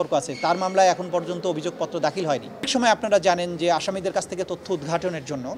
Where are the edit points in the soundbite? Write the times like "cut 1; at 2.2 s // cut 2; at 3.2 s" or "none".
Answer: cut 1; at 2.7 s